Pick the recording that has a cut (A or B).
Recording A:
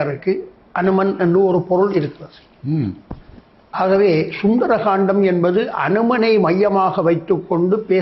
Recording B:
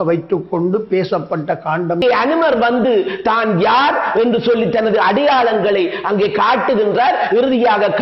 B